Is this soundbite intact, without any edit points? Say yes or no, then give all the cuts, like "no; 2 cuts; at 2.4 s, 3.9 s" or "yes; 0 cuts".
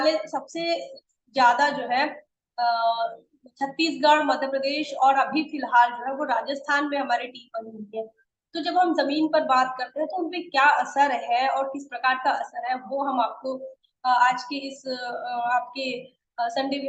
yes; 0 cuts